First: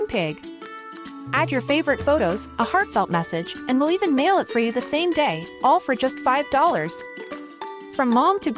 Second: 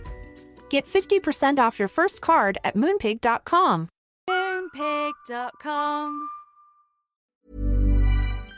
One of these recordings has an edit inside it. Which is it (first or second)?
second